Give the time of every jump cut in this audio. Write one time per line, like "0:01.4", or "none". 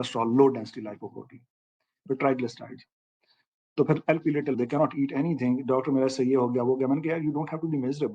0:04.6